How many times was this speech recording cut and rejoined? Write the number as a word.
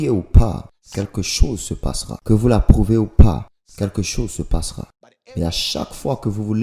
one